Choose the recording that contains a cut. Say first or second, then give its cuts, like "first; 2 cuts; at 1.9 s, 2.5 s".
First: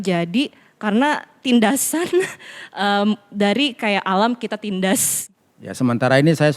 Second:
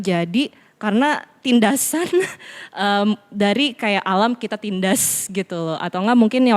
first; 1 cut; at 5.2 s